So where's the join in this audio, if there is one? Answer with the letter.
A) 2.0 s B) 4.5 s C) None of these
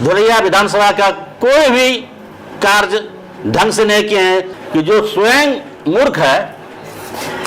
B